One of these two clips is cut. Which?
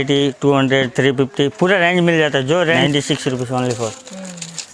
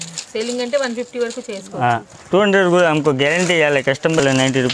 first; 1 cut; at 2.8 s

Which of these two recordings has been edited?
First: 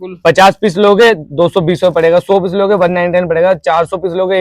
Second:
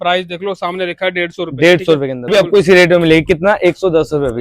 second; 1 cut; at 2.3 s

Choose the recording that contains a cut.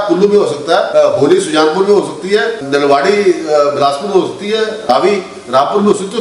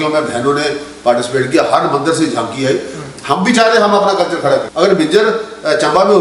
first; 3 cuts; at 0.9 s, 2.6 s, 4.9 s

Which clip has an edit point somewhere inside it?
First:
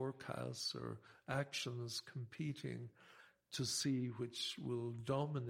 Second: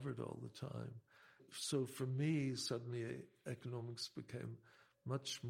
second; 1 cut; at 1.4 s

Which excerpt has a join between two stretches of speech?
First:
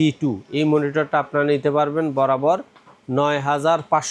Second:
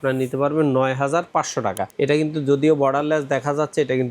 second; 1 cut; at 1.9 s

